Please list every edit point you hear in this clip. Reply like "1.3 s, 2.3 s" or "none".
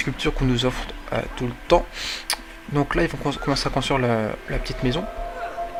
none